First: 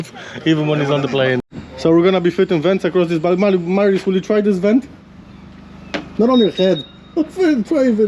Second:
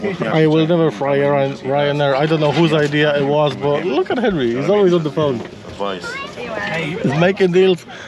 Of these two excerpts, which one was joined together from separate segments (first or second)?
first